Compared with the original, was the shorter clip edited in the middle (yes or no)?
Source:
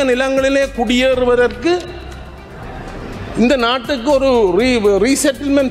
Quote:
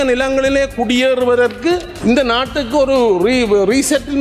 yes